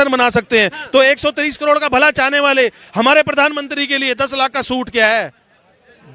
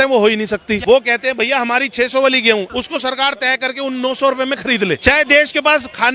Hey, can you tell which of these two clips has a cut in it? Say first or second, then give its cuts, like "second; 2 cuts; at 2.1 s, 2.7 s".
second; 3 cuts; at 0.8 s, 2.7 s, 5.0 s